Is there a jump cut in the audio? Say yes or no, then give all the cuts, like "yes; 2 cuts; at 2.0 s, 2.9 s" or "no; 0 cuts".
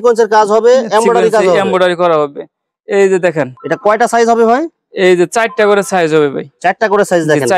no; 0 cuts